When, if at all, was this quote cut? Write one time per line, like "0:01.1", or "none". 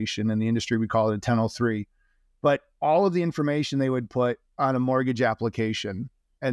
none